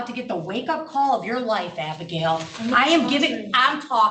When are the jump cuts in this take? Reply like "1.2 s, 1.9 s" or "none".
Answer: none